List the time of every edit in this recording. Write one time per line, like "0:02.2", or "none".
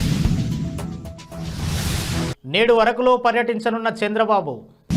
none